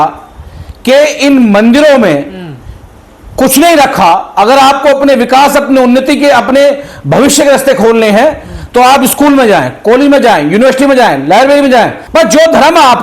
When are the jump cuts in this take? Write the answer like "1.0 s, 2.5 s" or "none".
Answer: 12.0 s